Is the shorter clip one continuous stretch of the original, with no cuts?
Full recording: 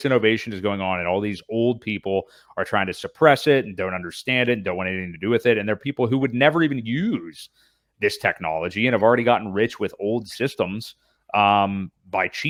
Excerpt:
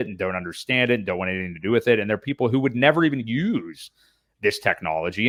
yes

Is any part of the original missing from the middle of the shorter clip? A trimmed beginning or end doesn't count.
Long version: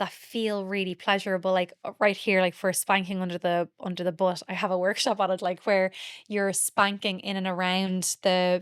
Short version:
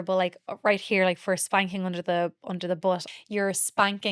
yes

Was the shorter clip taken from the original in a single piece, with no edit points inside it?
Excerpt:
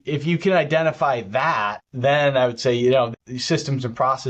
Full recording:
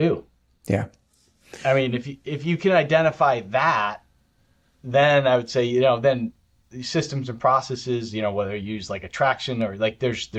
no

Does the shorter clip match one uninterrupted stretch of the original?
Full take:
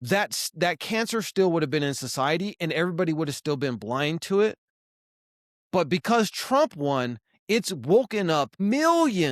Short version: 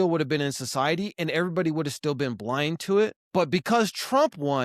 no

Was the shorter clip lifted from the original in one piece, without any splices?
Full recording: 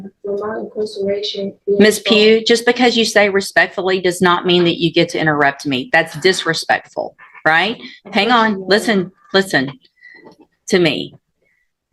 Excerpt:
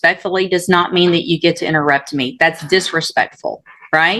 yes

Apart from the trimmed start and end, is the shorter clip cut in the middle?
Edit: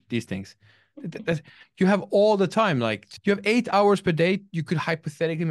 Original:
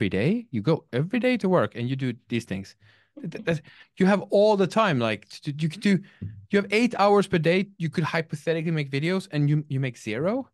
yes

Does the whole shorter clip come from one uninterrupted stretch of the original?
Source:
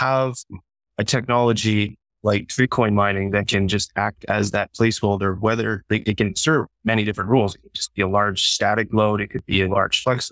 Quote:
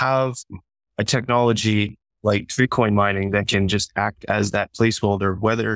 yes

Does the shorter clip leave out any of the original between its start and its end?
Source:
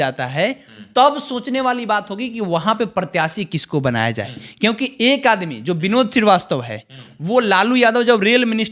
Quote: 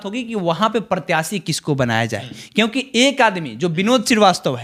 no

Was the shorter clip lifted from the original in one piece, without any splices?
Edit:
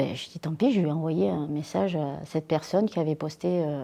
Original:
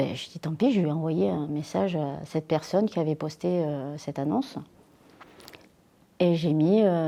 yes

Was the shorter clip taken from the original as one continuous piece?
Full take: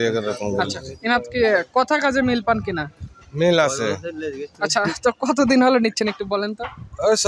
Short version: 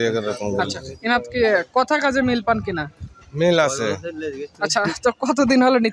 yes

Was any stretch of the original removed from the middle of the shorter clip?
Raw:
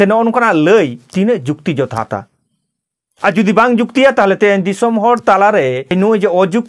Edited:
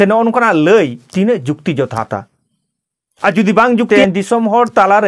yes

